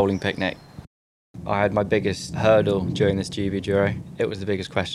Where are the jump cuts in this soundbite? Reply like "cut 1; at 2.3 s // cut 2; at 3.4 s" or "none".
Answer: cut 1; at 1.1 s // cut 2; at 2.3 s // cut 3; at 4.0 s